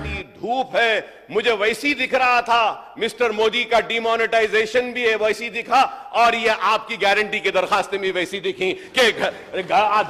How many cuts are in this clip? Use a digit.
0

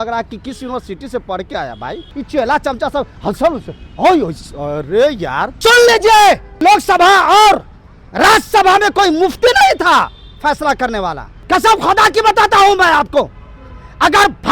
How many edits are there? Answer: 4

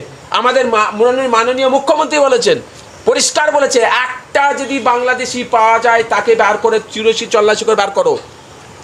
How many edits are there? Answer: 0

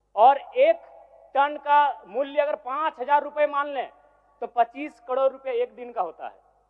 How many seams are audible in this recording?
0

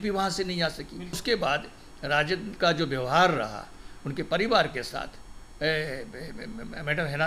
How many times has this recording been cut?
1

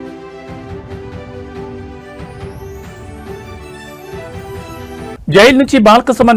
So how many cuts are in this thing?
2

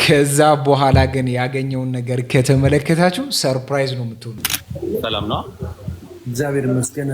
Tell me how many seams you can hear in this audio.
1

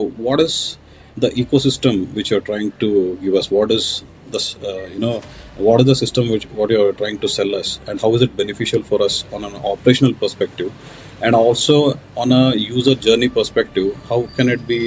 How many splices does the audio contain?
0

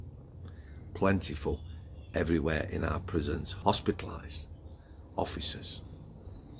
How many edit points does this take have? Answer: 1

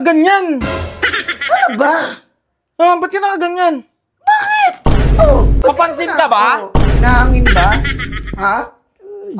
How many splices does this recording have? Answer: 1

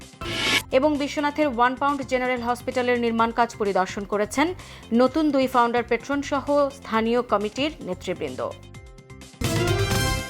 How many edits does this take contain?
1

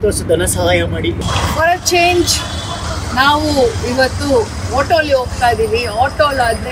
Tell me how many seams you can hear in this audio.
0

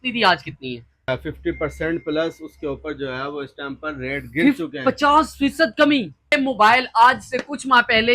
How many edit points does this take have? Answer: 2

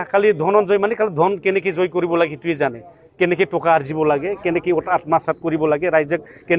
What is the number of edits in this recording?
0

